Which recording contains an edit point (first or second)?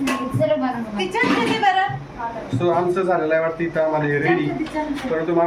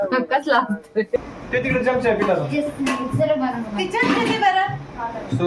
second